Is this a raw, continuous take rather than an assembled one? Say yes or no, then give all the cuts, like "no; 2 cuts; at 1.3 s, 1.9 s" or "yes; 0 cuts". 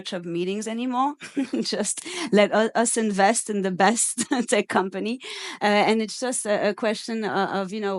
yes; 0 cuts